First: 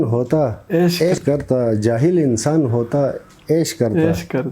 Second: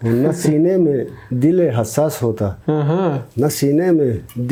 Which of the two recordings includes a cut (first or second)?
first